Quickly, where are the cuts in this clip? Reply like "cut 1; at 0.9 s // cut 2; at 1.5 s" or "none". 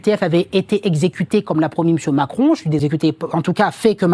cut 1; at 2.8 s